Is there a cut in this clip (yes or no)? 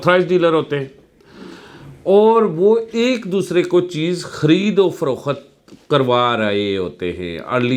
no